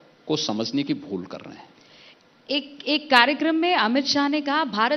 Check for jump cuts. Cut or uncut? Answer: uncut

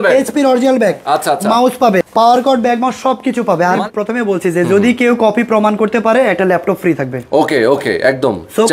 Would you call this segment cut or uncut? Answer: cut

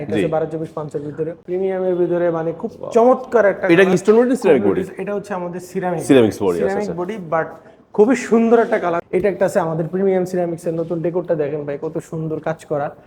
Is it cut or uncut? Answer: cut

